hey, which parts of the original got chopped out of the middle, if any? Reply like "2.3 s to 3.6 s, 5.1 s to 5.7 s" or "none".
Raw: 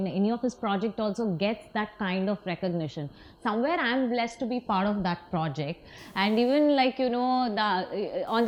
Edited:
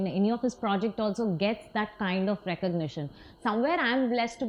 none

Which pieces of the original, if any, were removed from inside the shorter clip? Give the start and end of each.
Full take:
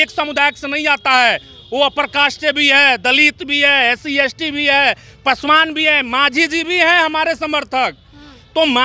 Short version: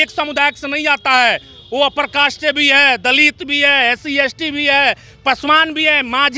none

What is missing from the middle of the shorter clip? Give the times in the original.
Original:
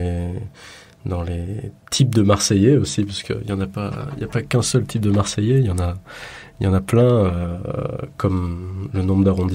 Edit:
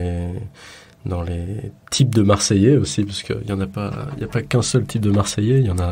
none

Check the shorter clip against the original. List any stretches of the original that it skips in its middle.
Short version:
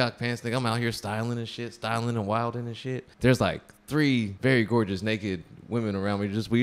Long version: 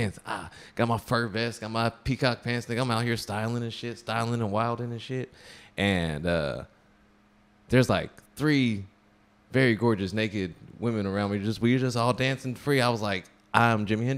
5.3 s to 7.6 s, 8.8 s to 9.4 s

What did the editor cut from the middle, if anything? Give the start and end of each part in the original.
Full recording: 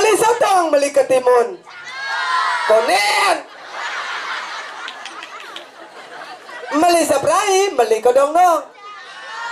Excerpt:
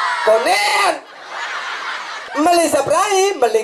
4.6 s to 6.5 s

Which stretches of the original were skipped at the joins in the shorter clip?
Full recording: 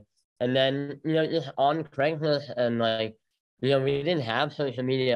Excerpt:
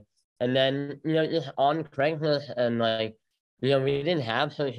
none

